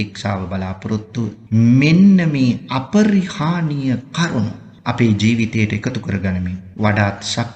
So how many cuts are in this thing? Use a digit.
3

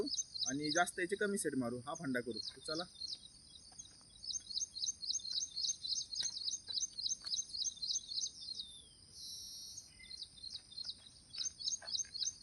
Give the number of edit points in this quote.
0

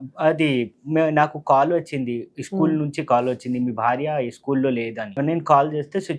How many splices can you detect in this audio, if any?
1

